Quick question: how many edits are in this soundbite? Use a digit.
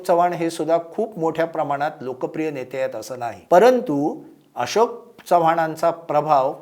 1